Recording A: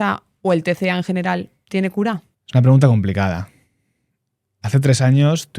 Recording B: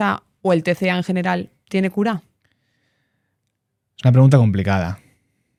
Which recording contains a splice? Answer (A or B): A